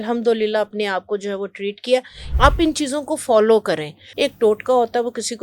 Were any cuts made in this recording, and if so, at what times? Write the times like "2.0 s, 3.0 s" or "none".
2.2 s, 4.0 s